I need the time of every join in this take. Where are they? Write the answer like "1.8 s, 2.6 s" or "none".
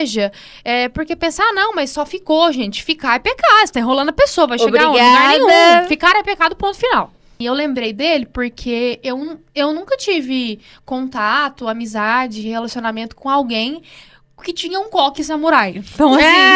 7.3 s